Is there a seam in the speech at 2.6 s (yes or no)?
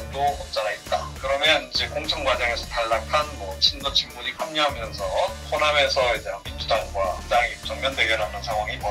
no